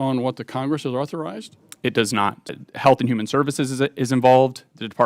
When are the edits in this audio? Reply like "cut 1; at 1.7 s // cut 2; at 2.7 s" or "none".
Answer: cut 1; at 2.6 s